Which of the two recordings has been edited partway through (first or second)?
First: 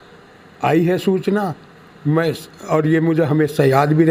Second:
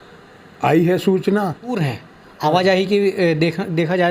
second